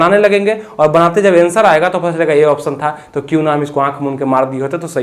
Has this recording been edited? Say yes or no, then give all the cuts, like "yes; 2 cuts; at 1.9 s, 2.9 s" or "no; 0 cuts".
no; 0 cuts